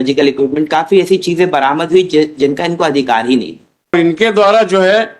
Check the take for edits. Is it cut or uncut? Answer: cut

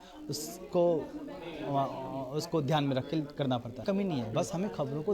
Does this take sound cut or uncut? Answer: cut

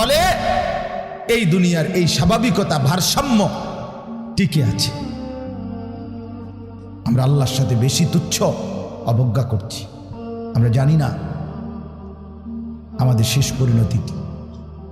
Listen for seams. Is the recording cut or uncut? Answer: cut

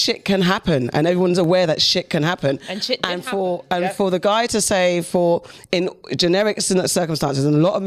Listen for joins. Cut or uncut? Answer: uncut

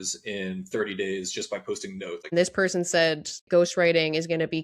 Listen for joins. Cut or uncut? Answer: cut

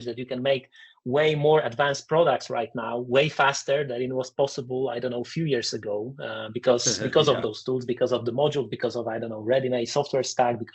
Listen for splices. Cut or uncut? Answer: uncut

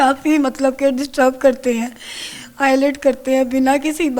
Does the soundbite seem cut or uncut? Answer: uncut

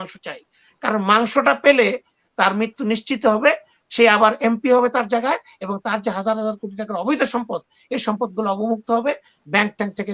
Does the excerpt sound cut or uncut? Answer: uncut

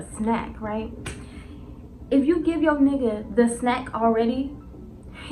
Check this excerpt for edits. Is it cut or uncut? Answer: uncut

